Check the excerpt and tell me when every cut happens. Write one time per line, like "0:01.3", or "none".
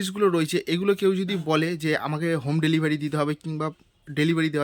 none